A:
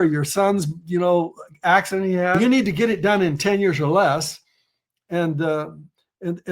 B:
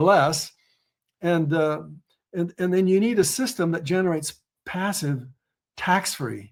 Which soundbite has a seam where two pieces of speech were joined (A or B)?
A